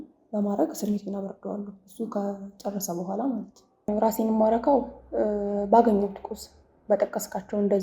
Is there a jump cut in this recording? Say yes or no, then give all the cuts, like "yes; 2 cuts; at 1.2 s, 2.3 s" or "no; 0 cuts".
yes; 1 cut; at 3.9 s